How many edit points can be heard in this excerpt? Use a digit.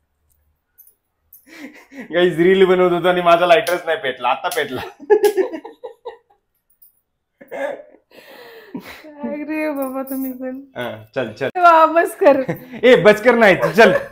1